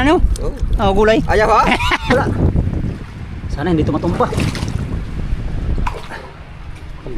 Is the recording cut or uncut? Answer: cut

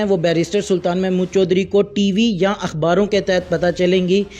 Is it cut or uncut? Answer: uncut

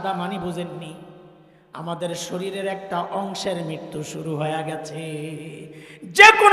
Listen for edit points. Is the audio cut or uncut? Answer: uncut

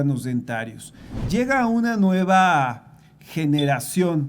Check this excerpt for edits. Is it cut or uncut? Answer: cut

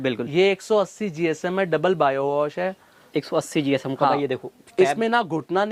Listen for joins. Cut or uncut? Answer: uncut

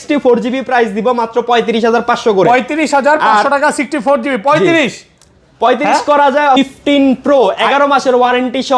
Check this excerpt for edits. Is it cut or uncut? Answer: cut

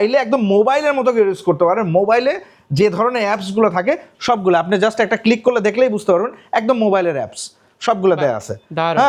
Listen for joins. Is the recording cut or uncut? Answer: uncut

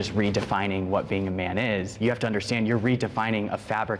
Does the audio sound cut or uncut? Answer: cut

